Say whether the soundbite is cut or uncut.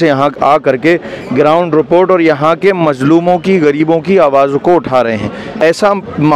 cut